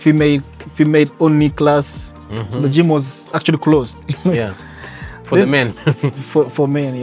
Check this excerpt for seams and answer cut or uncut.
uncut